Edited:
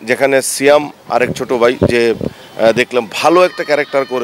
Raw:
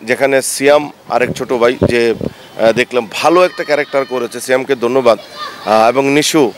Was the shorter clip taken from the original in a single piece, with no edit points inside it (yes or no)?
yes